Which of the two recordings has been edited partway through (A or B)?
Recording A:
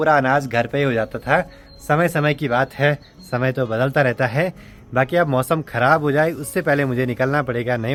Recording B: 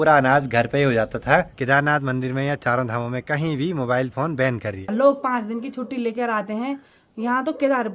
B